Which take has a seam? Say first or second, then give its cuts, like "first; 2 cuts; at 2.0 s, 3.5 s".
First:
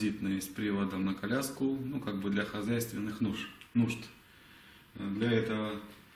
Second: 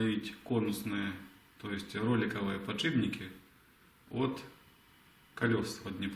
second; 1 cut; at 2.5 s